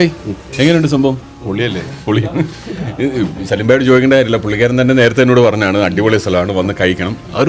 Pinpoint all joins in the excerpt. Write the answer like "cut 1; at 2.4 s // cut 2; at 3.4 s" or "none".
cut 1; at 1.3 s